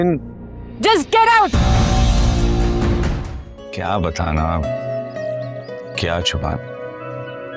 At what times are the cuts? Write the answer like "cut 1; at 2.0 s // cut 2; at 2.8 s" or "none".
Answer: cut 1; at 3.4 s